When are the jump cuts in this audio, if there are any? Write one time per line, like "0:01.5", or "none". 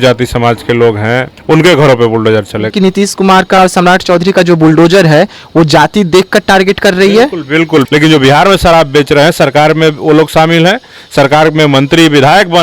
0:01.3
0:02.7
0:07.9